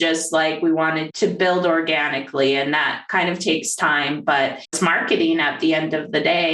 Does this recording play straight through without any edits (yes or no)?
no